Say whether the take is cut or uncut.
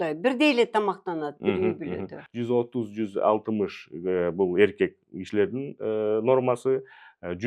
cut